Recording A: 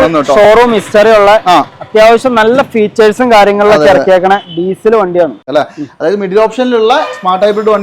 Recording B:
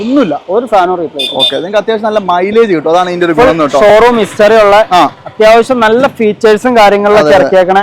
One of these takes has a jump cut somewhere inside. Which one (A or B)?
A